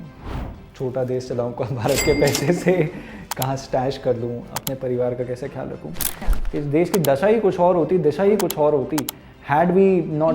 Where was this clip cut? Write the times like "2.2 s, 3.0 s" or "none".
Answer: 6.2 s